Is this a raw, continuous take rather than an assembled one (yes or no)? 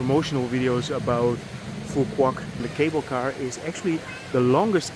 no